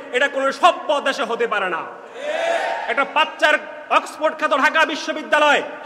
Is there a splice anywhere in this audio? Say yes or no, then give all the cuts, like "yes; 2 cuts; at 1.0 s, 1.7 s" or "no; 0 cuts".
no; 0 cuts